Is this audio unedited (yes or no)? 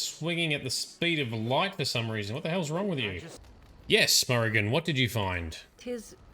no